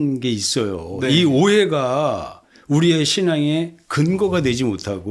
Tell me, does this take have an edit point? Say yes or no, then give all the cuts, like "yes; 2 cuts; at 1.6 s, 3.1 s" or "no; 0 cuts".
no; 0 cuts